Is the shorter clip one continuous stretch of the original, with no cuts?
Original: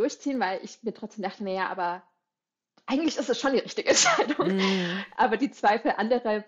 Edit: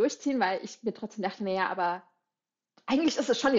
yes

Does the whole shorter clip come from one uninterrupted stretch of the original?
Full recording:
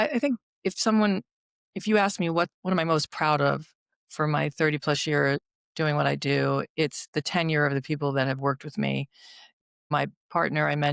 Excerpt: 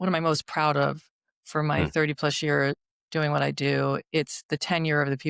yes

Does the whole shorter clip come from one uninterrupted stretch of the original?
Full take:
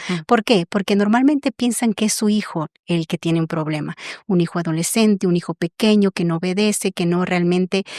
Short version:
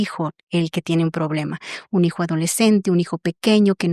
yes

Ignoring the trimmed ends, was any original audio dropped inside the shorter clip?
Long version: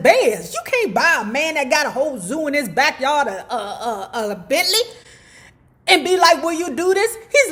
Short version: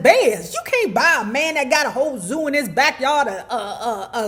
no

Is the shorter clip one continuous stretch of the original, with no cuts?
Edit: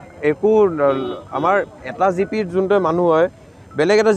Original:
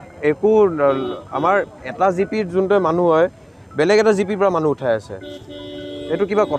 yes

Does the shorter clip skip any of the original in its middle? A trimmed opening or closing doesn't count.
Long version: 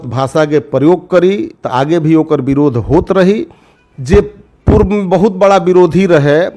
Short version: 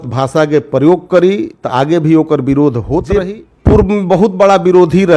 yes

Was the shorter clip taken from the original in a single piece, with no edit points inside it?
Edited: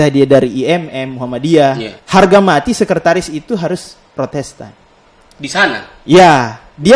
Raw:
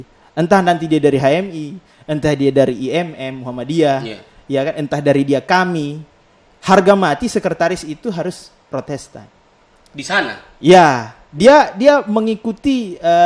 no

